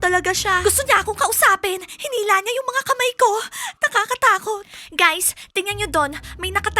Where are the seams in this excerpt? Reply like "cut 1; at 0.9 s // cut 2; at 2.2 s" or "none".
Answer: cut 1; at 4.7 s